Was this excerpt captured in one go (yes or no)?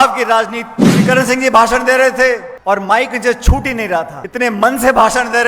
no